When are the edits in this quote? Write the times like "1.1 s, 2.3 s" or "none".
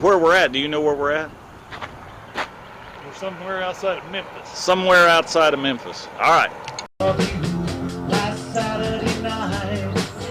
7.0 s